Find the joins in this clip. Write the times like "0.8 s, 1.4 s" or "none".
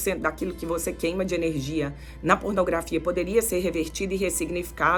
none